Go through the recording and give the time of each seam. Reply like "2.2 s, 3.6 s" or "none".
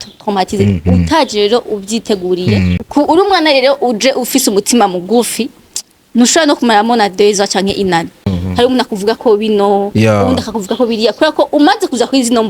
2.8 s, 8.3 s